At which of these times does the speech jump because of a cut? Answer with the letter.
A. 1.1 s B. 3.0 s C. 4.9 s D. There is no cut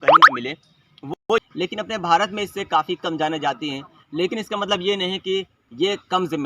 A